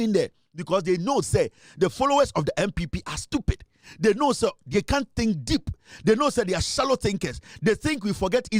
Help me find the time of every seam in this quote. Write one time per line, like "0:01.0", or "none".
none